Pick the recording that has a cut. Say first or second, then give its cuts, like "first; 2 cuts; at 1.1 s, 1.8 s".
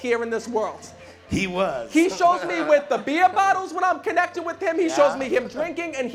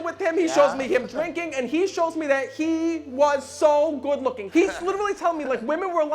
second; 1 cut; at 4.4 s